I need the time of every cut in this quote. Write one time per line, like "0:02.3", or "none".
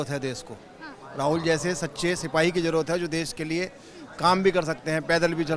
none